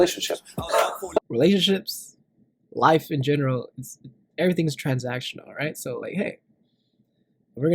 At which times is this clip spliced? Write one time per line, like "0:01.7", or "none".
0:01.2